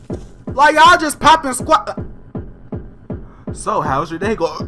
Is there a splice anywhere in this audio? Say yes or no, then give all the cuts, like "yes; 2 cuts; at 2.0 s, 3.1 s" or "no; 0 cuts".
no; 0 cuts